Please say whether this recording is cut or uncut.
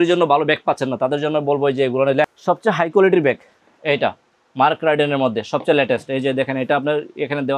cut